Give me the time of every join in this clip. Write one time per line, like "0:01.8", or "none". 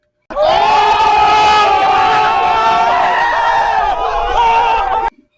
none